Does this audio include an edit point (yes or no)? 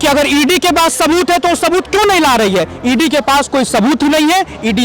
no